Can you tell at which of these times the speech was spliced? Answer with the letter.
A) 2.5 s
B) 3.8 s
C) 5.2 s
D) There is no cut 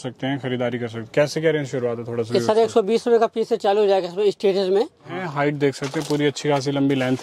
C